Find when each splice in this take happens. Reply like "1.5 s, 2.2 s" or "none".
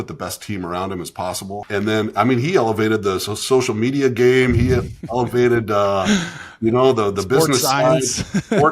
1.6 s